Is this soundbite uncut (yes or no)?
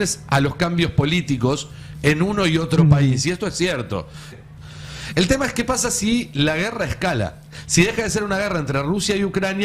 no